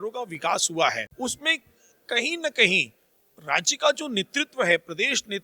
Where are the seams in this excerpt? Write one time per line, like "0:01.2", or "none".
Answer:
0:01.1